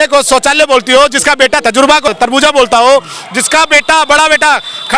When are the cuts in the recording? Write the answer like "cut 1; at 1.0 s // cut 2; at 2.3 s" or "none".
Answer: cut 1; at 1.8 s